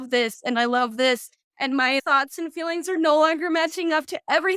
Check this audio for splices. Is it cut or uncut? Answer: cut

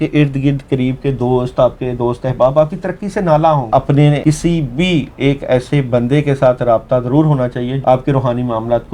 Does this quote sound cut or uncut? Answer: cut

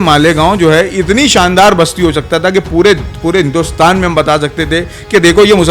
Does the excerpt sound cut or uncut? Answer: uncut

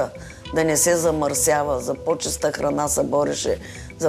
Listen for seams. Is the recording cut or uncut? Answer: uncut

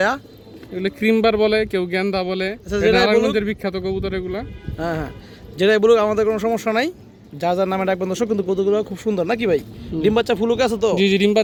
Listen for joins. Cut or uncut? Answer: uncut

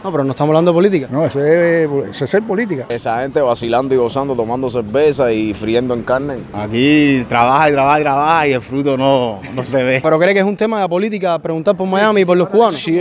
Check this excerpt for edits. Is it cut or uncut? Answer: cut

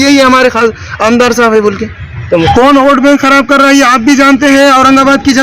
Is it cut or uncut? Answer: cut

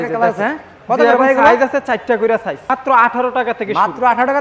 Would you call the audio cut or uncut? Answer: cut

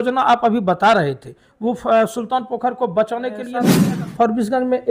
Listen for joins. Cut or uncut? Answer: cut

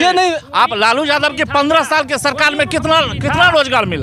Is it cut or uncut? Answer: uncut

